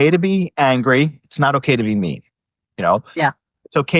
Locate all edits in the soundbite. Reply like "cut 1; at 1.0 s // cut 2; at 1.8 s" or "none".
none